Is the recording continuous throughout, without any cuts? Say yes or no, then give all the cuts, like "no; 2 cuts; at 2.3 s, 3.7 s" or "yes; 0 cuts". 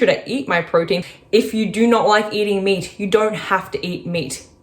no; 1 cut; at 1.1 s